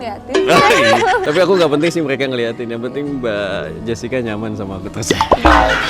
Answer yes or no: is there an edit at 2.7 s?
no